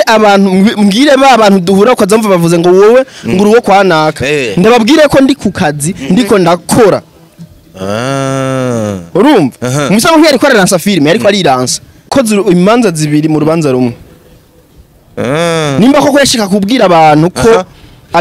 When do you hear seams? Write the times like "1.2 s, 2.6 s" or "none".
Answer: 12.1 s